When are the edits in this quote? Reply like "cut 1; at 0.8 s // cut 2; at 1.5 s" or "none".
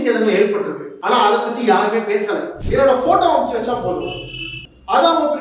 cut 1; at 2.6 s

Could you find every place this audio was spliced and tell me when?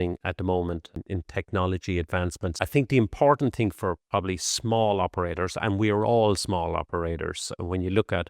cut 1; at 1.0 s // cut 2; at 2.5 s

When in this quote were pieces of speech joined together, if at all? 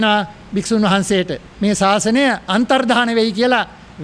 none

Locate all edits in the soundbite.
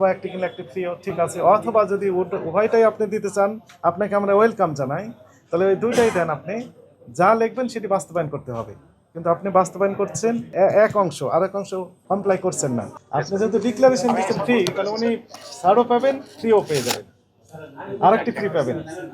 cut 1; at 10.5 s // cut 2; at 11.9 s // cut 3; at 13.0 s

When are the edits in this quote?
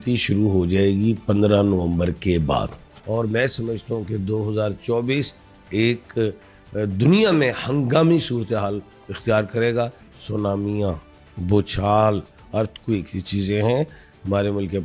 cut 1; at 2.9 s // cut 2; at 10.1 s

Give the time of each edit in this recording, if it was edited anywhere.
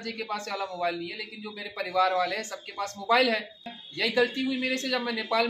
cut 1; at 3.8 s

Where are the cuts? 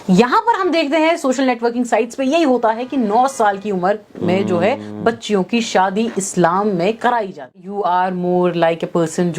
cut 1; at 7.5 s

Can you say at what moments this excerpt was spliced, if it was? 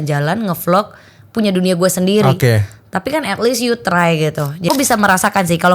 cut 1; at 4.7 s

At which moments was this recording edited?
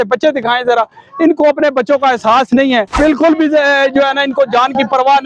cut 1; at 3.0 s

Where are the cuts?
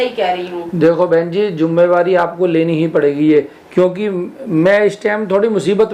none

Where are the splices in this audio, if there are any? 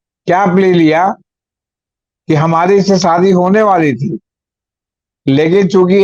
none

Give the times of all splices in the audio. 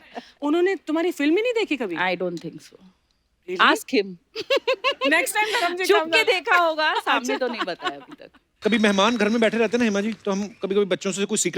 cut 1; at 8.5 s

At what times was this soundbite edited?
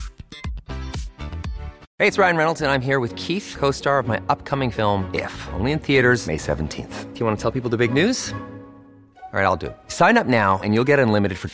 cut 1; at 1.8 s

